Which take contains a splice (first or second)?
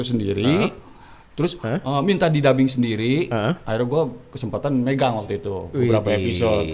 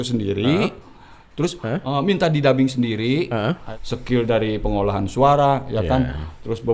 second